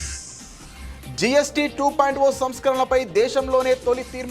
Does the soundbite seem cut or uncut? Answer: cut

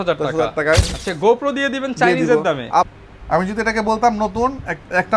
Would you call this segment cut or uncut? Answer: cut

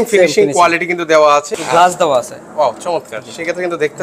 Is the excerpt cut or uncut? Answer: cut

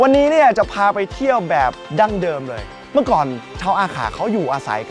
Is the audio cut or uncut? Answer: cut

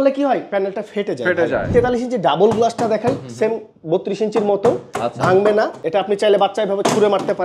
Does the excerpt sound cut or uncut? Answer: cut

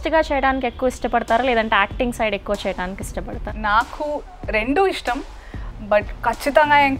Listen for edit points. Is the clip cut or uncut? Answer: cut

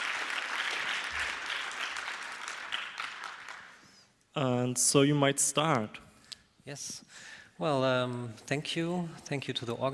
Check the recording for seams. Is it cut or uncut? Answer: uncut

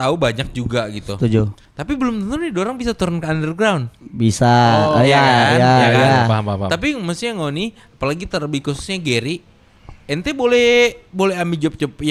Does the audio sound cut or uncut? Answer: uncut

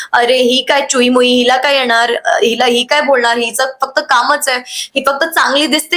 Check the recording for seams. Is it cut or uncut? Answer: uncut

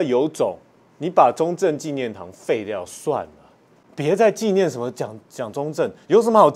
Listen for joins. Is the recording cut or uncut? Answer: cut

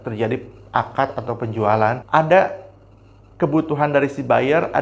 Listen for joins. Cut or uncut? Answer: cut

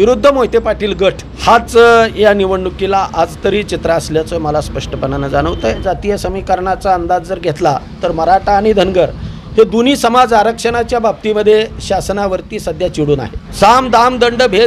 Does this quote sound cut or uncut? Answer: cut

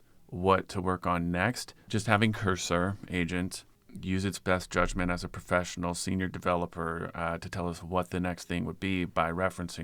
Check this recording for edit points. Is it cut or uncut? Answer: uncut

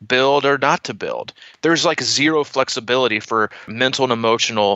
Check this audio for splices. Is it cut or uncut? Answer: cut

